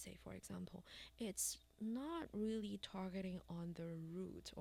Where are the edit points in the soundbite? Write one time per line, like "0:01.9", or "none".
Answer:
none